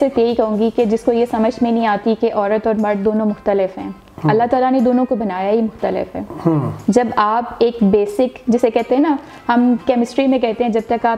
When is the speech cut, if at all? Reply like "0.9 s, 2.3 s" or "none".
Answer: none